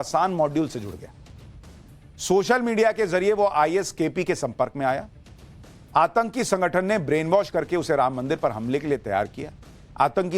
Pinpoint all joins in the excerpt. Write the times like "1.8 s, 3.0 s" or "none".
7.7 s